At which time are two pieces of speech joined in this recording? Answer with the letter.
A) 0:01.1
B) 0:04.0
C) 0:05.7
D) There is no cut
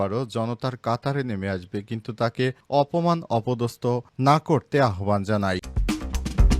C